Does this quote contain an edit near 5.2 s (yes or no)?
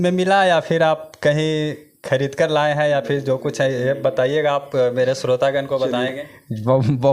no